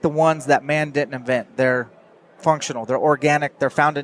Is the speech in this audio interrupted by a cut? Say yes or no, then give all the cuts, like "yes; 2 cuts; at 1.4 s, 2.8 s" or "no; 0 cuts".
no; 0 cuts